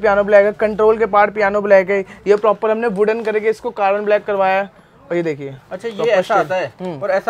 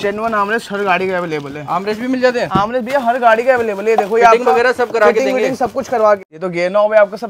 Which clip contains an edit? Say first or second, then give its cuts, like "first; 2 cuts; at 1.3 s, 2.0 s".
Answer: second; 1 cut; at 6.3 s